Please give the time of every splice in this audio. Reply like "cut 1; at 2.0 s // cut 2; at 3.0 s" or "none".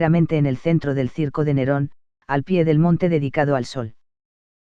cut 1; at 1.1 s